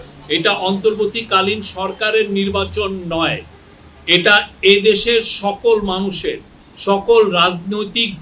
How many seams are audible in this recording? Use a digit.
0